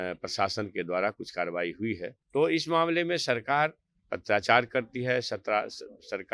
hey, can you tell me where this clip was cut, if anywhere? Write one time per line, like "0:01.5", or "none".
0:02.1